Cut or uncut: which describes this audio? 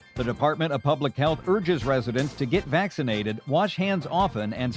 uncut